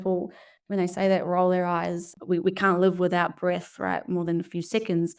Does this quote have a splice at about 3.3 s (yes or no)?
no